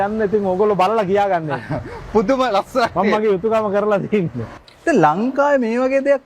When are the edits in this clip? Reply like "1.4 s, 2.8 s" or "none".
4.5 s